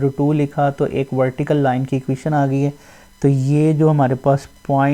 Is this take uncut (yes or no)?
yes